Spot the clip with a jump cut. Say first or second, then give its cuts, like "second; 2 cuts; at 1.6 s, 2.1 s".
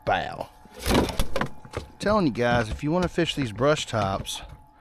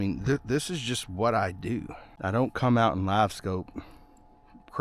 second; 1 cut; at 2.0 s